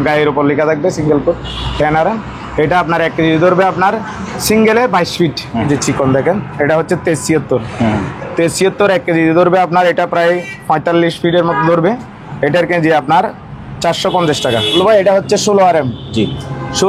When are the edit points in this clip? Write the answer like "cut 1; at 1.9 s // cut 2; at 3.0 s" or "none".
cut 1; at 5.6 s // cut 2; at 14.7 s